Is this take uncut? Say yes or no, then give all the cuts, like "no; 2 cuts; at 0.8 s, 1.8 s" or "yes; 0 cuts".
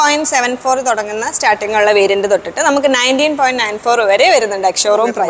yes; 0 cuts